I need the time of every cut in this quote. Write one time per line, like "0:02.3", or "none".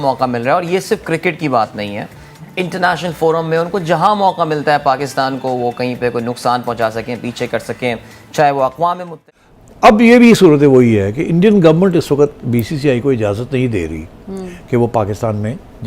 0:09.1